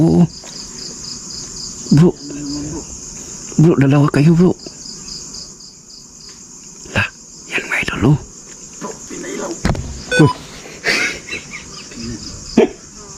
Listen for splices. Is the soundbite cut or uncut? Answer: uncut